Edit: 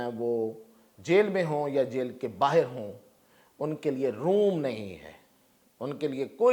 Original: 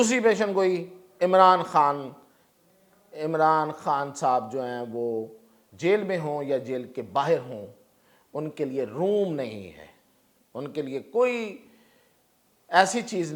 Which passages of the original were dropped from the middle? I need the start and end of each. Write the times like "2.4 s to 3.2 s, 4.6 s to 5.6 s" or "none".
none